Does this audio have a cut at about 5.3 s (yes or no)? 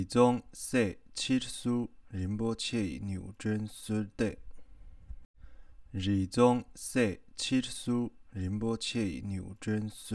yes